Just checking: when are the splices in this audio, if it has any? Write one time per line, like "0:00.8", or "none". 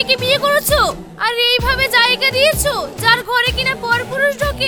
none

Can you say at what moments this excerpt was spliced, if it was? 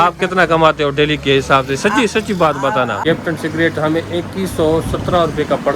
0:03.0

